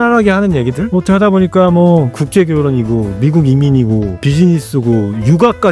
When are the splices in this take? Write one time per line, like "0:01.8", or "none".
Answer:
0:00.8
0:02.2
0:04.2